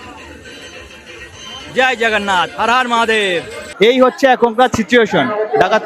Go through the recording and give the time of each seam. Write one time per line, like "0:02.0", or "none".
0:03.7